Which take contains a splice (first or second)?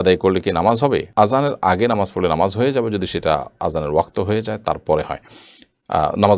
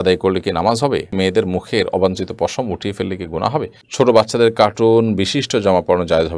second